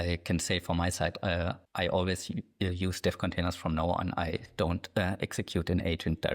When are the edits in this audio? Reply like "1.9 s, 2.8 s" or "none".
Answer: 1.6 s